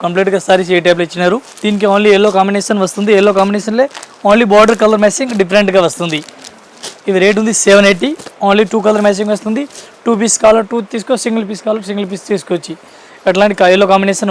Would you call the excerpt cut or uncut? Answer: uncut